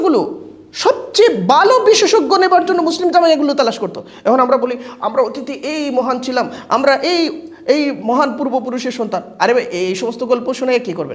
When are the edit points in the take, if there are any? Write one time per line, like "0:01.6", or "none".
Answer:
none